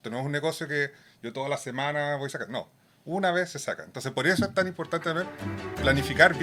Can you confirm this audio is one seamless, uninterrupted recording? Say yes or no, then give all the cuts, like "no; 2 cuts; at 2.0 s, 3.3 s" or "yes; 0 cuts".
yes; 0 cuts